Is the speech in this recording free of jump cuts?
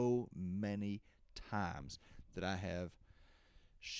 yes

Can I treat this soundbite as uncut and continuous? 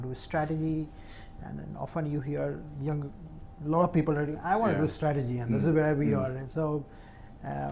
yes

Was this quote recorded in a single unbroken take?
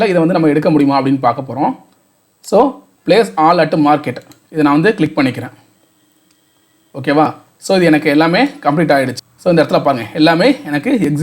no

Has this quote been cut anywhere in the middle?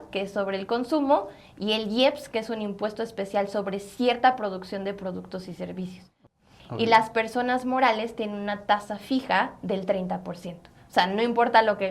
yes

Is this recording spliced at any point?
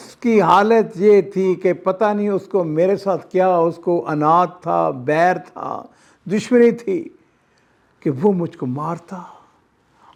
no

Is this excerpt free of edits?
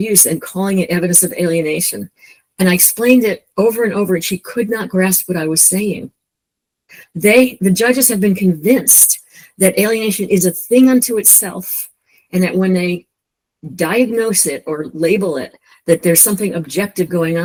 yes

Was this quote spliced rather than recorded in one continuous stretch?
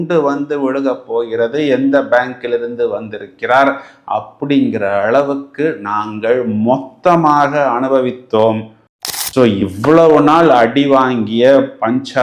yes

